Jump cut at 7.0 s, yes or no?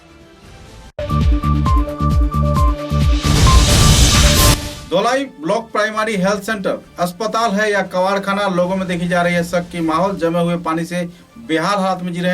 no